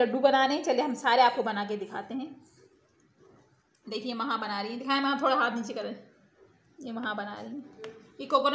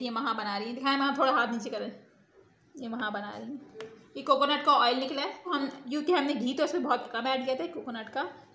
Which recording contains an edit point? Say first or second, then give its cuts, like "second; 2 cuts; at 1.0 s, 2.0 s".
second; 1 cut; at 5.6 s